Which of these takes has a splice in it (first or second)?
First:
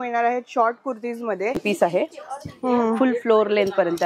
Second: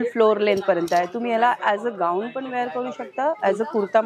first